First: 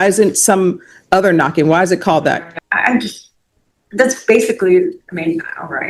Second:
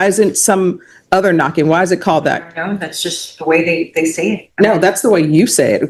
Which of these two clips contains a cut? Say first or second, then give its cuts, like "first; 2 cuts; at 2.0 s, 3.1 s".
first; 1 cut; at 2.5 s